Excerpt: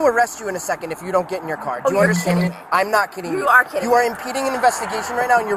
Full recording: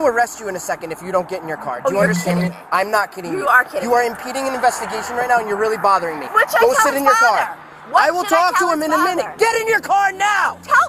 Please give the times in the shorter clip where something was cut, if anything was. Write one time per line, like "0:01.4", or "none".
none